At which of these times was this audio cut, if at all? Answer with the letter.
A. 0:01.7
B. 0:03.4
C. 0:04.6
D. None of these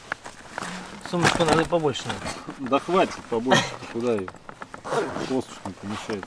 D